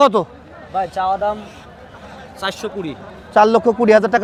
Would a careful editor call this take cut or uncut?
uncut